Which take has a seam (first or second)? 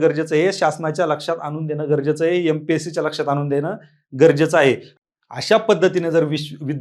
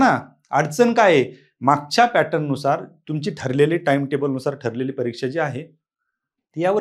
first